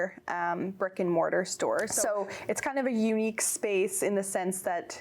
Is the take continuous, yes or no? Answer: no